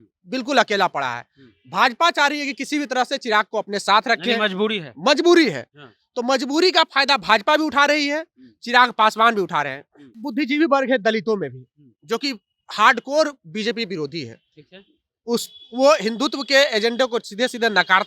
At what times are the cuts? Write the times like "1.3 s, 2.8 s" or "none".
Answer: 10.2 s